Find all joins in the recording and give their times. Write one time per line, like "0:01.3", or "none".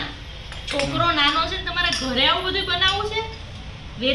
none